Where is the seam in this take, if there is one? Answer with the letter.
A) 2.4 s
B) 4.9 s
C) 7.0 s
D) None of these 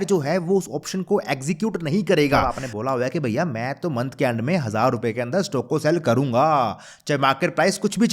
A